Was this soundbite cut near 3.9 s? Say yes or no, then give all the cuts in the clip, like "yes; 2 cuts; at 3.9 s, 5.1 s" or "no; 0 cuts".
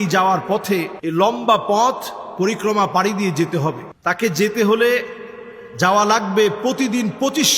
yes; 2 cuts; at 1.0 s, 3.9 s